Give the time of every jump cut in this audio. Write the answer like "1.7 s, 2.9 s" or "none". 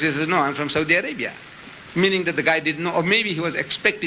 none